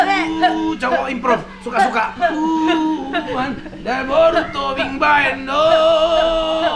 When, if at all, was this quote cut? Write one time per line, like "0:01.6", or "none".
none